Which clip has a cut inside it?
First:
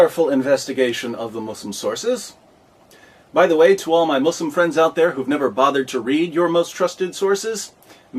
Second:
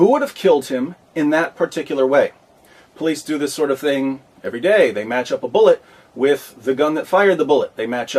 second; 1 cut; at 3.8 s

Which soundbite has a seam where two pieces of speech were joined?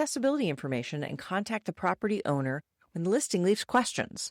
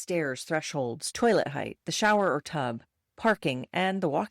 second; 1 cut; at 1.0 s

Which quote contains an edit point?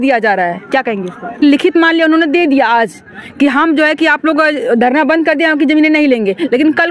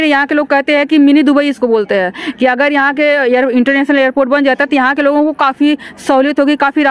first; 1 cut; at 1.4 s

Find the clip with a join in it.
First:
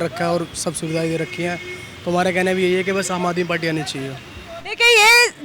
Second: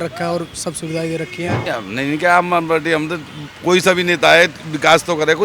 second; 1 cut; at 1.6 s

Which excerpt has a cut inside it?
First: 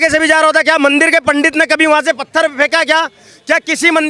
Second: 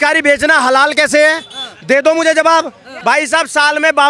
second; 1 cut; at 2.9 s

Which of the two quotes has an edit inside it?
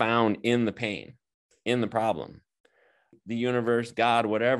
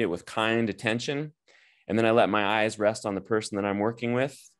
first; 1 cut; at 3.1 s

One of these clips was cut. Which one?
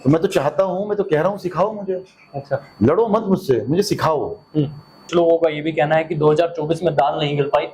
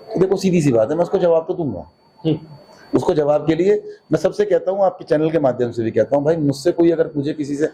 first; 1 cut; at 5.0 s

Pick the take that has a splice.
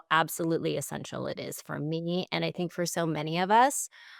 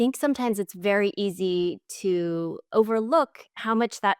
second; 1 cut; at 2.6 s

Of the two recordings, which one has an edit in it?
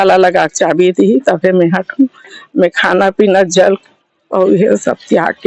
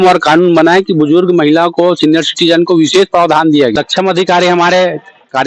second; 1 cut; at 3.7 s

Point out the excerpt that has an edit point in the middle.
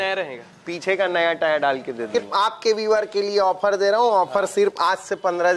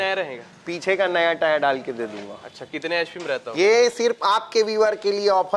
first; 1 cut; at 2.1 s

